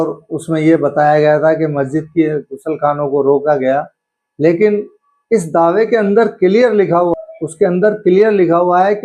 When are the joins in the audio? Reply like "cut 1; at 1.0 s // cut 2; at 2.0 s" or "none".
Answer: cut 1; at 7.1 s